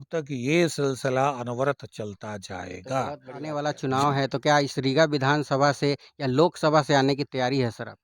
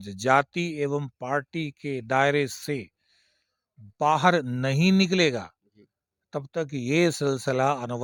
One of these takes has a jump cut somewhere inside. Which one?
first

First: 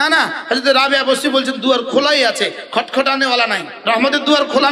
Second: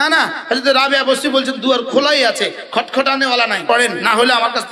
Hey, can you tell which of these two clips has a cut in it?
second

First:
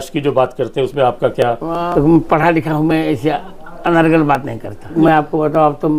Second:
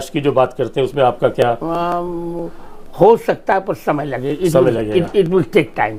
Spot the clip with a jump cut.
first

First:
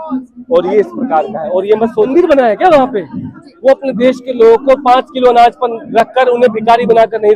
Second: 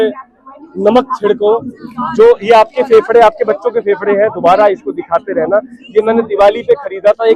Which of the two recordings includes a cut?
first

